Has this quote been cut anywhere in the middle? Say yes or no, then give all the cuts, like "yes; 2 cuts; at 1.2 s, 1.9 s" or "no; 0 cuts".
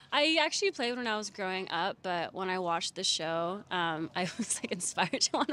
no; 0 cuts